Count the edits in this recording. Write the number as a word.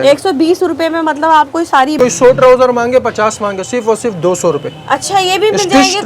one